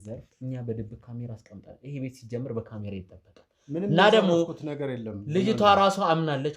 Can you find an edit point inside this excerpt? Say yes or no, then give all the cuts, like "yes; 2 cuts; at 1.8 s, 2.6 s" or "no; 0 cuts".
no; 0 cuts